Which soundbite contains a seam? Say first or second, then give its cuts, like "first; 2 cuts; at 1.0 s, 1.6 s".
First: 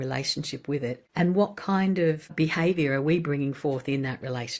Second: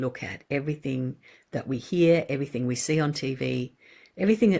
first; 2 cuts; at 1.0 s, 2.3 s